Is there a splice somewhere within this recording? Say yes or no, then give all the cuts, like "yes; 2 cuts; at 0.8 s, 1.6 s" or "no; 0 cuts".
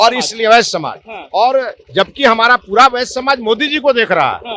no; 0 cuts